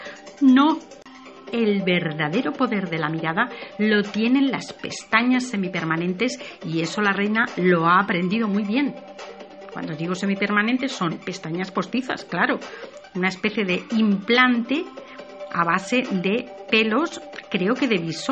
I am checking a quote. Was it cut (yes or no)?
yes